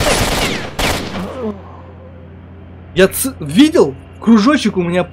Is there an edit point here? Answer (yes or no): no